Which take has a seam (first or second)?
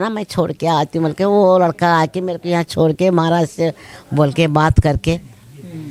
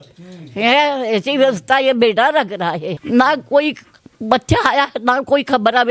second